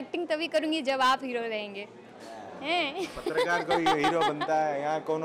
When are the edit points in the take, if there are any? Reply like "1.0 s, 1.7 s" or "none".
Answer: none